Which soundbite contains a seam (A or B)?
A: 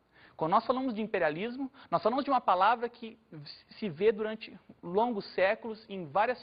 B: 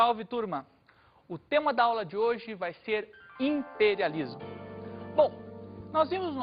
B